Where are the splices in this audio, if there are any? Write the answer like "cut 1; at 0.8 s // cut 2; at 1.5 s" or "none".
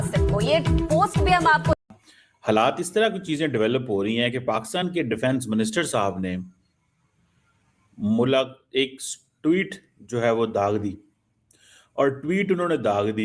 cut 1; at 1.8 s